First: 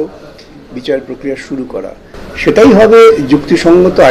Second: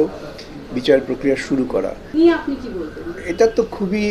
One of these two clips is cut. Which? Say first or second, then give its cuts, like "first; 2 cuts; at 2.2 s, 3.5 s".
second; 1 cut; at 2.0 s